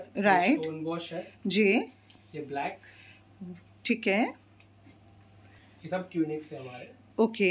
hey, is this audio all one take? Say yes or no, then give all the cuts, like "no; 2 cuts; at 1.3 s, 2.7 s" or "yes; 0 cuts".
no; 1 cut; at 5.6 s